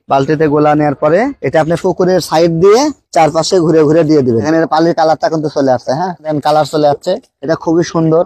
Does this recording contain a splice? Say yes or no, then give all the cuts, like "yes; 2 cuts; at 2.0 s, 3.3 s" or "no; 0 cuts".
yes; 1 cut; at 4.4 s